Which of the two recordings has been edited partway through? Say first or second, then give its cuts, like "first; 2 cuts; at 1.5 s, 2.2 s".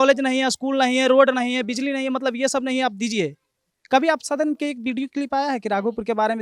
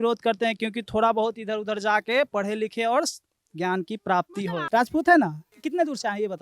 second; 2 cuts; at 4.6 s, 5.5 s